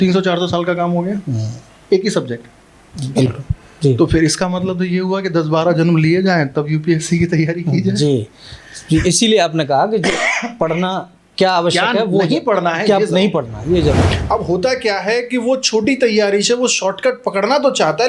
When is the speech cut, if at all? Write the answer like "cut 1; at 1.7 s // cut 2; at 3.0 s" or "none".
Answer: cut 1; at 14.1 s